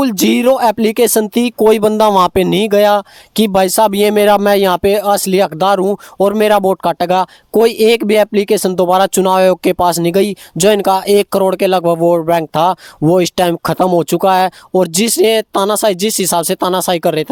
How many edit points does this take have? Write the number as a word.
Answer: zero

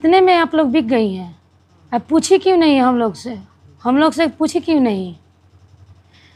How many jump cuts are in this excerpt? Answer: zero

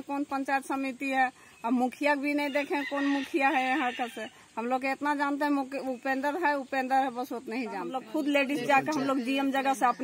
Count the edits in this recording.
one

